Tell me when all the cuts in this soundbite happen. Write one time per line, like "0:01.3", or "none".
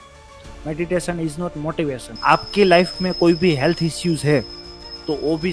0:02.1